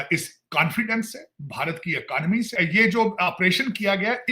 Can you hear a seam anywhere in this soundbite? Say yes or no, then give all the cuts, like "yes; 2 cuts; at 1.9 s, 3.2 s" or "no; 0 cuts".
yes; 1 cut; at 2.5 s